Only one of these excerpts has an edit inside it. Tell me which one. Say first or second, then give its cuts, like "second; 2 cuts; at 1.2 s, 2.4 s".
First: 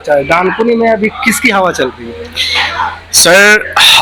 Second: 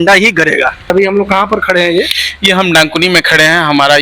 second; 1 cut; at 0.9 s